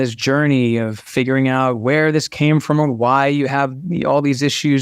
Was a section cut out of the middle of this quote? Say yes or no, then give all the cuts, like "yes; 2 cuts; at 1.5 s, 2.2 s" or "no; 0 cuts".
no; 0 cuts